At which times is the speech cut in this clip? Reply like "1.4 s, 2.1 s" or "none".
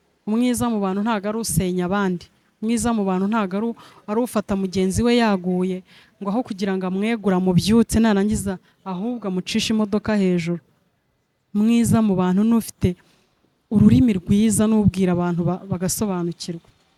none